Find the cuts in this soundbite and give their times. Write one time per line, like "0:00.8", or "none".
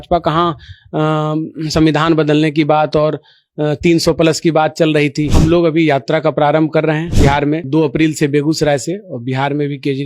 0:05.3
0:07.5

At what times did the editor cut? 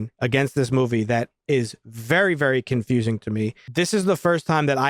0:03.6

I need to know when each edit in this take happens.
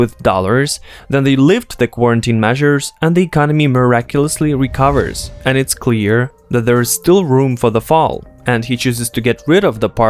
0:05.2

